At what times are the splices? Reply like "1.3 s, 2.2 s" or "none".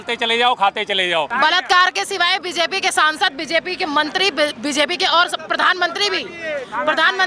1.3 s